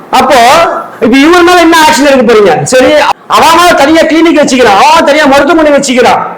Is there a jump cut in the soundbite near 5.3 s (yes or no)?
no